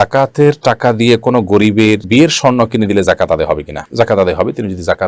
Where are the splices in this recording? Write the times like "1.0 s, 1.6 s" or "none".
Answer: none

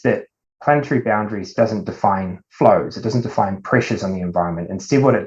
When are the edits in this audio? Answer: none

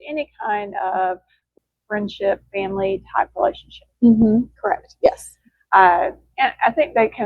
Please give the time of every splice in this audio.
1.5 s

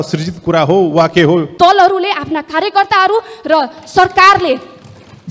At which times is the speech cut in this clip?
1.5 s

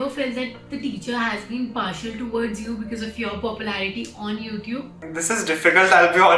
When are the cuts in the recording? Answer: 5.0 s

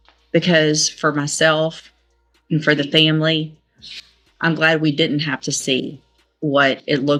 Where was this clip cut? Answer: none

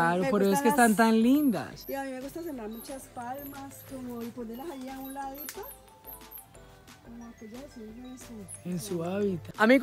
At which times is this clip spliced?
none

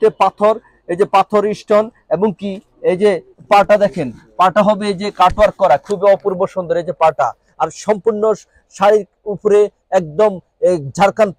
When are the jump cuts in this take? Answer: none

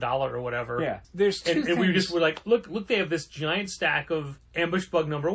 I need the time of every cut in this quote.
1.0 s, 4.4 s

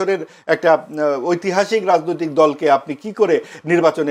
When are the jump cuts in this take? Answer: none

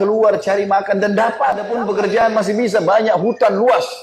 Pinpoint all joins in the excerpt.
2.2 s

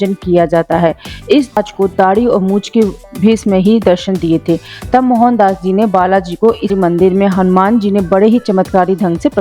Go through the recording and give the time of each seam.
1.6 s, 6.7 s

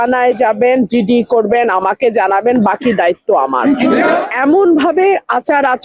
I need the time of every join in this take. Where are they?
4.2 s

